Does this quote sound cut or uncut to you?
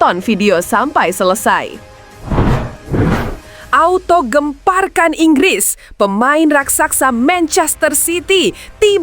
cut